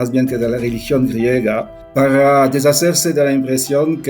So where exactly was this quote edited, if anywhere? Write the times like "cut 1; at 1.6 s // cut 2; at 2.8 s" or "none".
cut 1; at 1.8 s